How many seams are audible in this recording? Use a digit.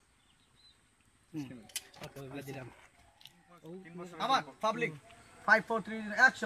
1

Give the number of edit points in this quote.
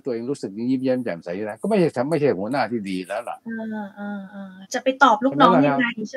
0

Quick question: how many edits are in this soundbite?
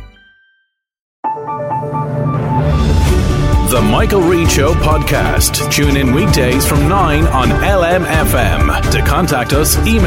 1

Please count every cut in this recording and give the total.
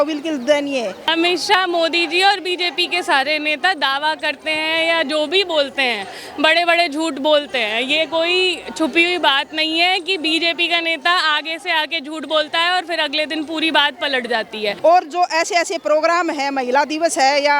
2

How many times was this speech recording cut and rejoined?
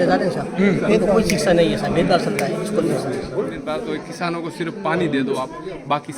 1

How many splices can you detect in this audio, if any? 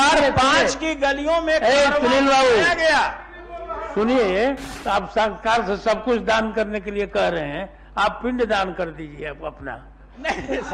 1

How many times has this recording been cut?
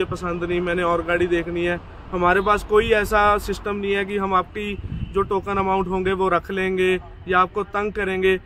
0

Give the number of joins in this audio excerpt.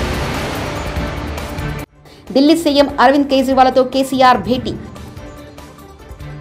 1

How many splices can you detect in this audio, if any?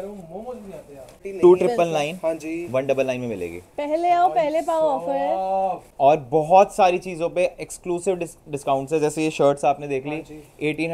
2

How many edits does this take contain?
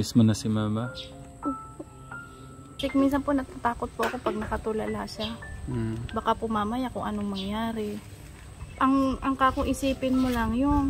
1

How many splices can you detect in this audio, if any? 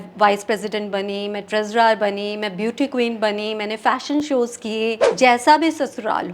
1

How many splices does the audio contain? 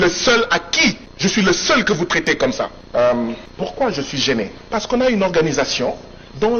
4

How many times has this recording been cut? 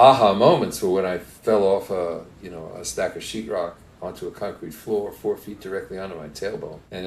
0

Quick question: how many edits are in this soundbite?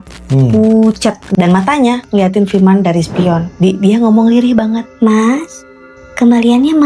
3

